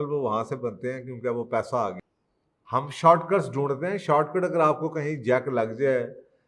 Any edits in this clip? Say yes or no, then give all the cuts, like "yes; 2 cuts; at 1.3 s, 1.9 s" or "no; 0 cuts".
yes; 1 cut; at 2.0 s